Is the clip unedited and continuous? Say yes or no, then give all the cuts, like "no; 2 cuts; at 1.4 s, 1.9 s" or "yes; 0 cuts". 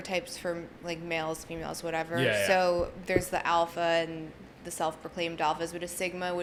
yes; 0 cuts